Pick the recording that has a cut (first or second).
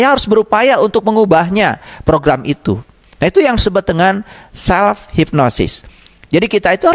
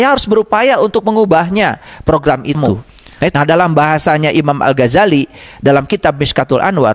second